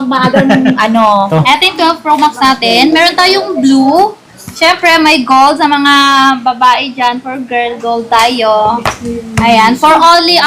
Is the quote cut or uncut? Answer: cut